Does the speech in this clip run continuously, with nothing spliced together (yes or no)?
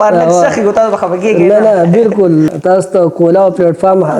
no